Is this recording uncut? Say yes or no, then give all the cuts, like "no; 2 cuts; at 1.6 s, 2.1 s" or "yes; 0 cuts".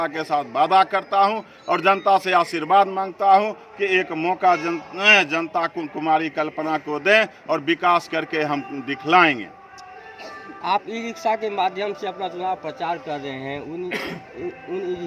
yes; 0 cuts